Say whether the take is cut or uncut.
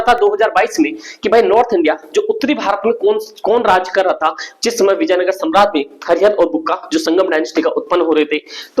uncut